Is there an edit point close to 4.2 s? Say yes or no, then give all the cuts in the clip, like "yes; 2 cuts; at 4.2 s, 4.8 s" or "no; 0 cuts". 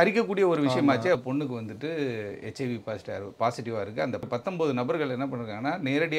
yes; 2 cuts; at 1.2 s, 4.2 s